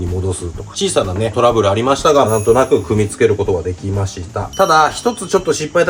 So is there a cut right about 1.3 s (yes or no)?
no